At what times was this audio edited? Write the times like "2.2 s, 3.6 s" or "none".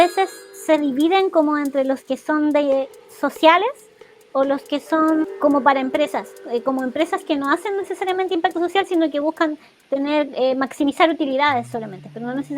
5.2 s

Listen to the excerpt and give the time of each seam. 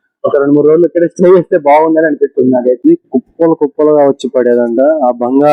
2.8 s

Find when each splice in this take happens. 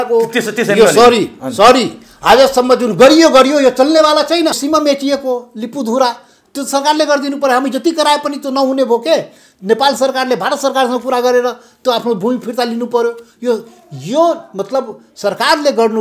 4.6 s

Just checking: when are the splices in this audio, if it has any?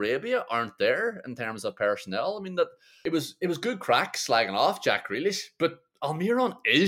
2.9 s

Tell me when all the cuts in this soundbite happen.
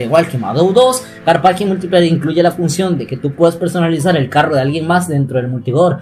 none

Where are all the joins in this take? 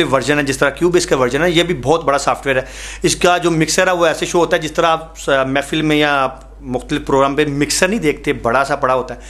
none

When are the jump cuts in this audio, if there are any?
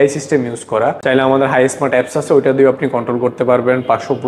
1.0 s

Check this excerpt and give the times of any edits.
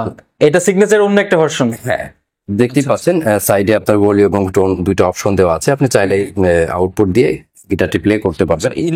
none

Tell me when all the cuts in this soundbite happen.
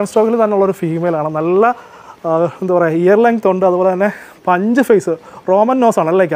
none

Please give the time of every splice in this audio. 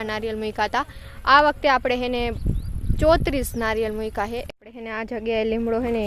4.6 s

